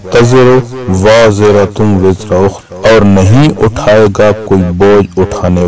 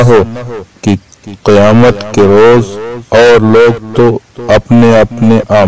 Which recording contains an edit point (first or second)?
first